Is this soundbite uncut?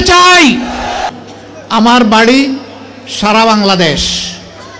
no; 1 cut; at 1.0 s

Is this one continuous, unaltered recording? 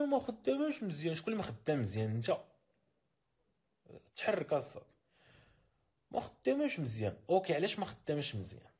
yes; 0 cuts

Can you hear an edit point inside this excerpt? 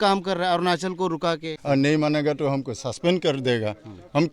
yes; 1 cut; at 1.5 s

